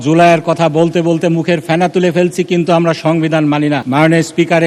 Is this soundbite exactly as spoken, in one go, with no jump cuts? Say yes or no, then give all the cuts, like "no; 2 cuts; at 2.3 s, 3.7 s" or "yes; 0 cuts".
yes; 0 cuts